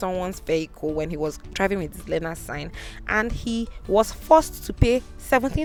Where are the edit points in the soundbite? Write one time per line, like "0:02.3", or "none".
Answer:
none